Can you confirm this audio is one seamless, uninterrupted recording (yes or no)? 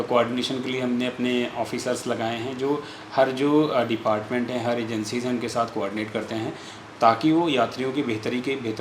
yes